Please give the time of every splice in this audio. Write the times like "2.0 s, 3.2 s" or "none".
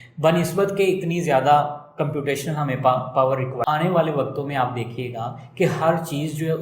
3.6 s